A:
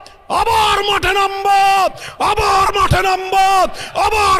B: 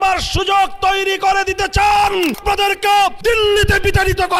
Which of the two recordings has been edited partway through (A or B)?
B